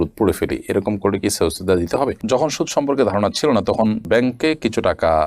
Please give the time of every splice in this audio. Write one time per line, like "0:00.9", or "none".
0:02.2